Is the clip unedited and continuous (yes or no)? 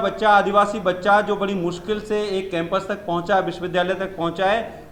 yes